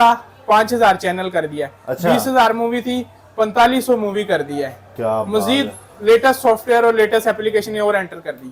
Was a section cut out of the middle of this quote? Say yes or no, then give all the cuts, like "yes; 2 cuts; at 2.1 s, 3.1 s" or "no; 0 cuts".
no; 0 cuts